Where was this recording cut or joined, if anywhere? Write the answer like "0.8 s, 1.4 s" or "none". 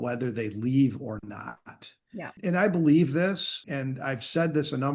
2.3 s, 3.6 s